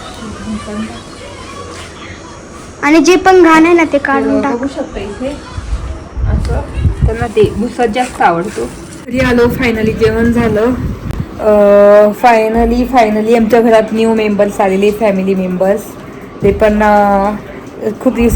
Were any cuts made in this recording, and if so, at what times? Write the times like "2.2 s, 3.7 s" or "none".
9.0 s

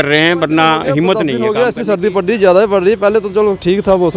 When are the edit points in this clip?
1.4 s

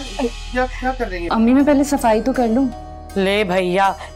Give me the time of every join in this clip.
1.3 s

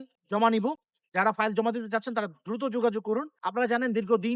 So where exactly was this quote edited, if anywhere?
3.4 s

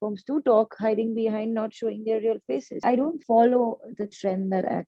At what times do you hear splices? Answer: 2.8 s

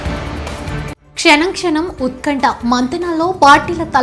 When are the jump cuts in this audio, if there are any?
1.0 s

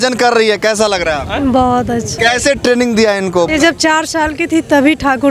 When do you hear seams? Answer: 2.1 s, 3.5 s

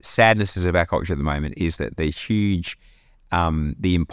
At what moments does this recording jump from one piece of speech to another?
none

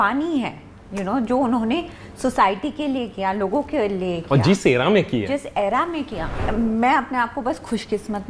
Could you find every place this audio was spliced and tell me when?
6.4 s

